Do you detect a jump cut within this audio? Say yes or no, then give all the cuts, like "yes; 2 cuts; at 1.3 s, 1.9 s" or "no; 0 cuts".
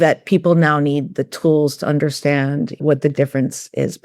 yes; 1 cut; at 2.7 s